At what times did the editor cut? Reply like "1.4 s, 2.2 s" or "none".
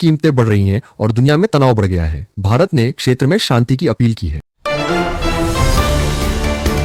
none